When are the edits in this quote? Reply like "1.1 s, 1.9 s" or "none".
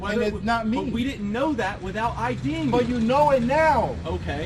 none